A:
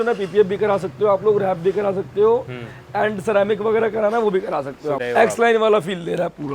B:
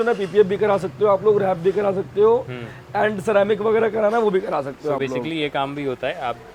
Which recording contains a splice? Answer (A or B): A